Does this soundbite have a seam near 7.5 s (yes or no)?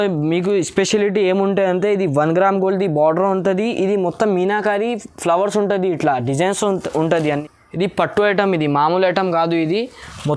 yes